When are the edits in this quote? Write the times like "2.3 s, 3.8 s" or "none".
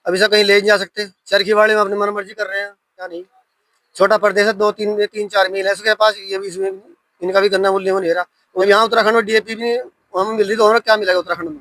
3.2 s, 8.4 s